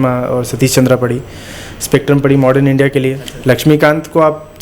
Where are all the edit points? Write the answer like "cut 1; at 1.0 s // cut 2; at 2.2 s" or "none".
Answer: cut 1; at 3.3 s